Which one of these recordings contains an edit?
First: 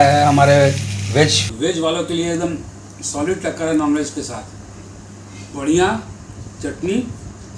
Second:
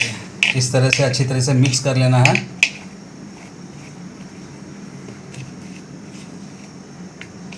first; 1 cut; at 1.4 s

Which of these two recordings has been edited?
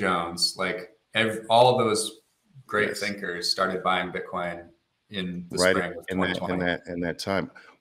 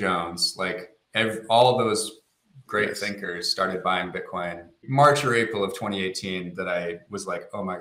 second; 1 cut; at 4.8 s

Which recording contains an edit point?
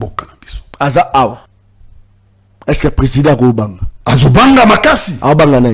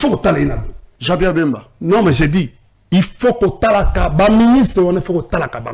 first; 1 cut; at 1.5 s

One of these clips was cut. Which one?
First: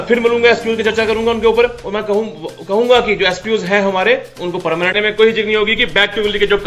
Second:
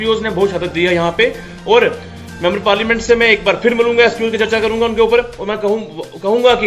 first; 1 cut; at 5.0 s

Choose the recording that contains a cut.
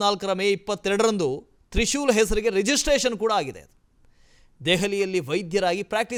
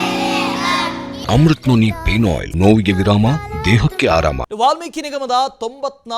second; 3 cuts; at 1.1 s, 2.5 s, 4.5 s

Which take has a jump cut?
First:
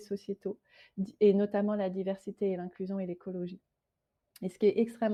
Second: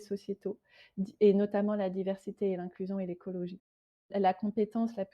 second; 1 cut; at 4.1 s

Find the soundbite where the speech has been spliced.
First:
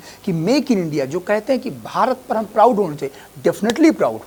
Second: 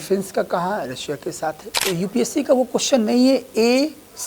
second; 1 cut; at 1.8 s

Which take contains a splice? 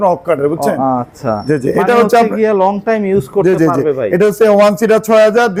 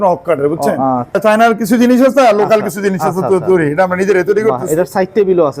second; 1 cut; at 1.2 s

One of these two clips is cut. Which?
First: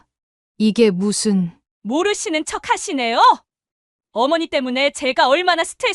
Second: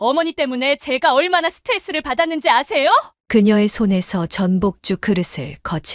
second; 1 cut; at 3.2 s

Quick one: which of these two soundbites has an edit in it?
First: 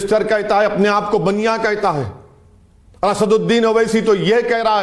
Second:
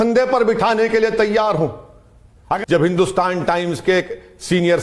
second; 1 cut; at 2.6 s

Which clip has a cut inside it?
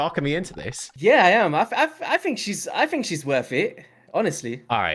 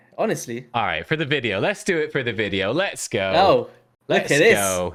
first; 1 cut; at 1.0 s

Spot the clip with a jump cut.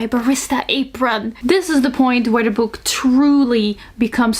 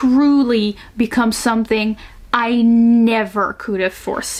first; 1 cut; at 1.3 s

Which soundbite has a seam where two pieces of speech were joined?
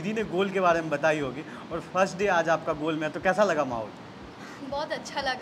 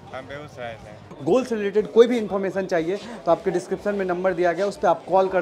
second; 1 cut; at 1.0 s

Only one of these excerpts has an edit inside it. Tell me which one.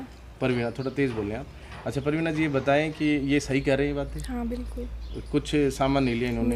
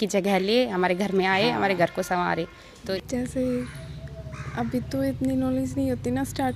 second; 1 cut; at 2.9 s

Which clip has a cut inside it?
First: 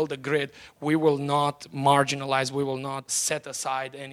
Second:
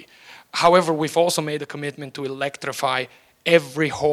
first; 1 cut; at 3.1 s

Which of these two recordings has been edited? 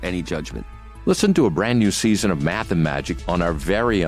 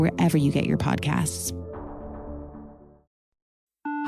second; 1 cut; at 3.1 s

